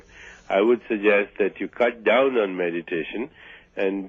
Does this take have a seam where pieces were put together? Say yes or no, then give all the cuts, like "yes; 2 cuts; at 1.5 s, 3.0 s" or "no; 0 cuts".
yes; 1 cut; at 1.7 s